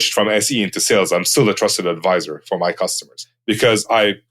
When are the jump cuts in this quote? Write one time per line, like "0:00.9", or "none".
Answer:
0:02.9